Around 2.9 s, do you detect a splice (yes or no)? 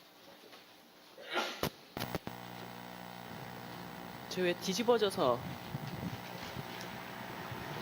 no